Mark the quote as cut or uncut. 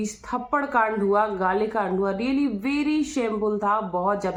uncut